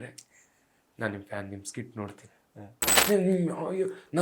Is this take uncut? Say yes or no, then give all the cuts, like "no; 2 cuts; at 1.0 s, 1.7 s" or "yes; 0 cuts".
no; 1 cut; at 2.9 s